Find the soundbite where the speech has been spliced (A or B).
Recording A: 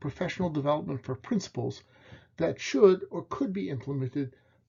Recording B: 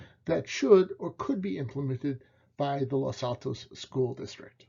B